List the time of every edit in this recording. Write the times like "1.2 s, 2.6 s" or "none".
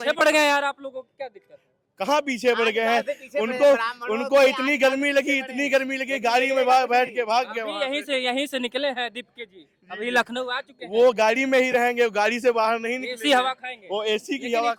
none